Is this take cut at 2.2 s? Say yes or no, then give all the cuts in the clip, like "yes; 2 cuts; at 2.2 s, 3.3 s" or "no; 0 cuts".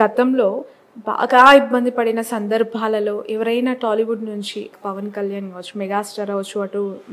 no; 1 cut; at 4.7 s